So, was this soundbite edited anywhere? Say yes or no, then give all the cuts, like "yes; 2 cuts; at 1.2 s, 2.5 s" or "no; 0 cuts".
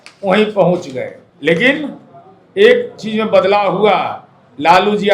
yes; 1 cut; at 1.2 s